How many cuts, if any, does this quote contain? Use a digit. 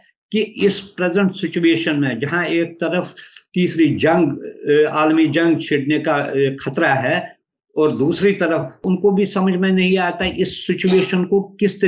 1